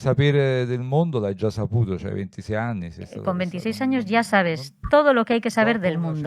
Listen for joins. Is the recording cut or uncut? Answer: cut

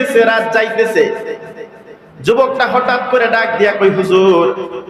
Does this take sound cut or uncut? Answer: uncut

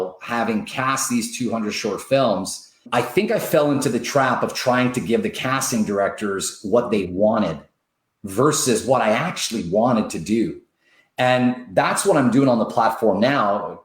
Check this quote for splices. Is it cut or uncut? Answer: cut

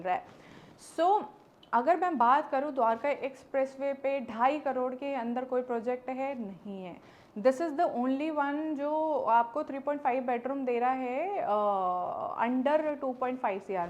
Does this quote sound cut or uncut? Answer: uncut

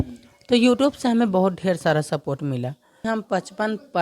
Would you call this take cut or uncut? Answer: cut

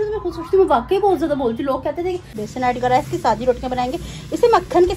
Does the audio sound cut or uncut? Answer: cut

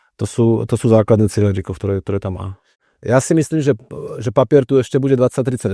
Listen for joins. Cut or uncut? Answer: cut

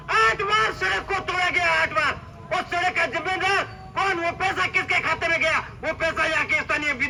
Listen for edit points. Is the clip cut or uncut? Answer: uncut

